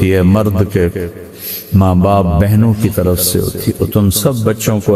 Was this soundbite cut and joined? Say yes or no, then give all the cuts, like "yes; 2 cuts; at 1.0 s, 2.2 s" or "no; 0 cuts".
yes; 1 cut; at 3.7 s